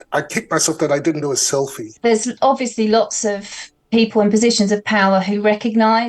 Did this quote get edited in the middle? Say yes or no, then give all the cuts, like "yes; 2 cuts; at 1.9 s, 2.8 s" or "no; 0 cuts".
yes; 1 cut; at 2.0 s